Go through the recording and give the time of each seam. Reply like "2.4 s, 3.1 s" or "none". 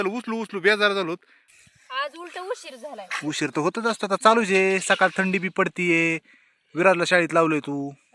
1.5 s